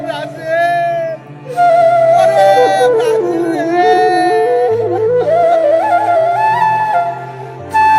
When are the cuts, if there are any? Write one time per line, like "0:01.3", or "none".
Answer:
none